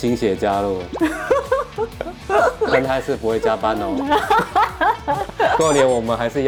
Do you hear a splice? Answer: no; 0 cuts

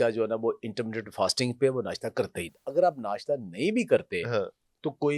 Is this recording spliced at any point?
yes; 1 cut; at 2.6 s

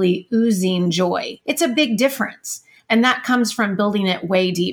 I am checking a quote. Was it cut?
yes; 1 cut; at 1.4 s

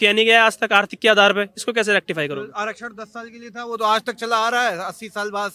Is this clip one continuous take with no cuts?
yes; 0 cuts

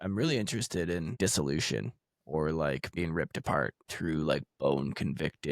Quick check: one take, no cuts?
no; 3 cuts; at 1.2 s, 3.0 s, 3.8 s

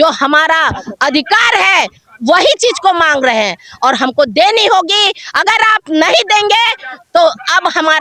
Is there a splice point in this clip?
no; 0 cuts

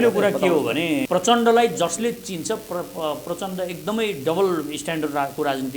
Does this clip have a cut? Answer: yes; 1 cut; at 1.0 s

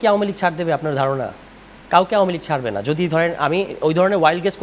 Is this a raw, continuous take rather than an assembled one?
yes; 0 cuts

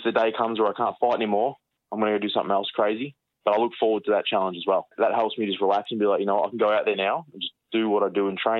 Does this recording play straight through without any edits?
no; 1 cut; at 4.9 s

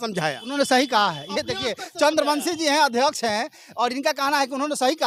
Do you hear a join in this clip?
no; 0 cuts

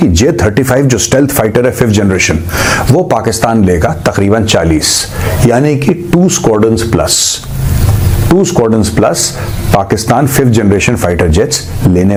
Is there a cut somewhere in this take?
no; 0 cuts

